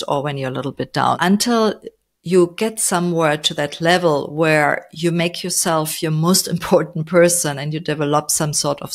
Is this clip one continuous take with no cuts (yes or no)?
no